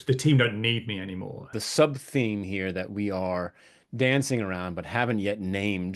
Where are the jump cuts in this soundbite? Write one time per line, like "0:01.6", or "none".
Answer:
0:01.5